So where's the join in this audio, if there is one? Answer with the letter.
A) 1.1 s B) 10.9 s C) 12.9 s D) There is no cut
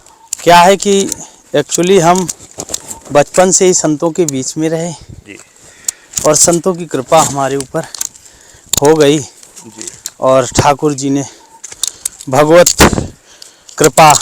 D